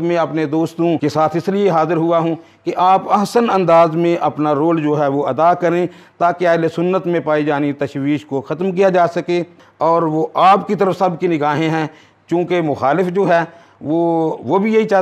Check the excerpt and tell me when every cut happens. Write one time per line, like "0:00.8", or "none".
0:01.0